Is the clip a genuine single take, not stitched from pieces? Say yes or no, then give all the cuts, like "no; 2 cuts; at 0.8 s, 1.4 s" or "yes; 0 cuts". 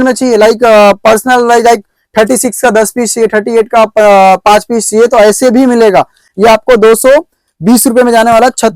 yes; 0 cuts